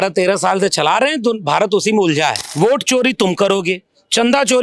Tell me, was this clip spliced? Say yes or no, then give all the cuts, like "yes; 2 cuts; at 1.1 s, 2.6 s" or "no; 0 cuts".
yes; 1 cut; at 2.4 s